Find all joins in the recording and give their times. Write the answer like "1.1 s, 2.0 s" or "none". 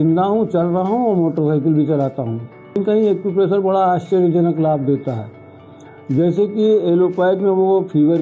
2.8 s

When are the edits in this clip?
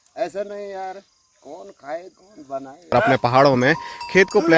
2.9 s

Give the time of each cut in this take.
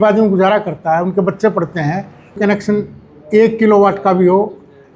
2.4 s

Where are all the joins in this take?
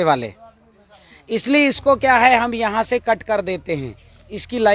none

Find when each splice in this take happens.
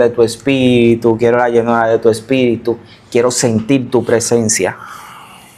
none

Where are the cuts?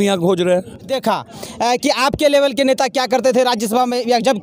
0.9 s

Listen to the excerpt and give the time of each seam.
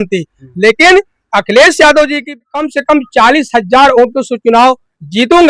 2.4 s

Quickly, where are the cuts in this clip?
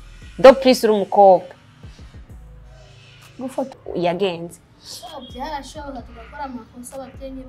3.8 s

